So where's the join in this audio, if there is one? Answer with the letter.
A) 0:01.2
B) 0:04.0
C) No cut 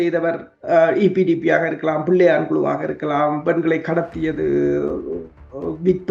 C